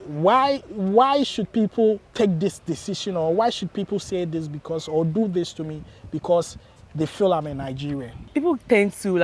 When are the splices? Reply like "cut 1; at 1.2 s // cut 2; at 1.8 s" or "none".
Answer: cut 1; at 2.1 s // cut 2; at 8.2 s